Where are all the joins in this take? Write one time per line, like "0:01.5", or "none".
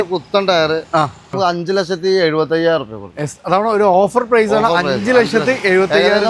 0:01.3